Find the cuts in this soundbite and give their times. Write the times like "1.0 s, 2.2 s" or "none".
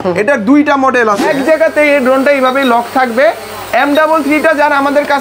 1.2 s